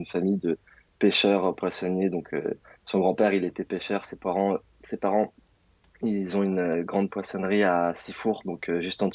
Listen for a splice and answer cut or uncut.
uncut